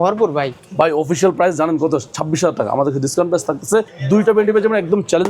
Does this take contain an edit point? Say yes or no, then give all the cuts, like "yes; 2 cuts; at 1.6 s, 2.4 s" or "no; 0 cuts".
yes; 1 cut; at 4.0 s